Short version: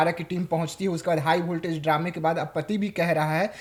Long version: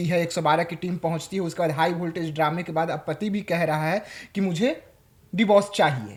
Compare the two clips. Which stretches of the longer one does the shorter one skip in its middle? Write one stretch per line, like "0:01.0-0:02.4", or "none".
none